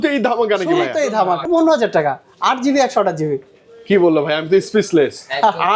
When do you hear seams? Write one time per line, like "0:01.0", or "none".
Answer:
0:01.5